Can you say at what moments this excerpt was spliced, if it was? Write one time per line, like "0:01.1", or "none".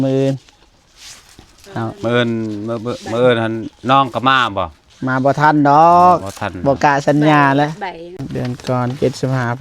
0:08.2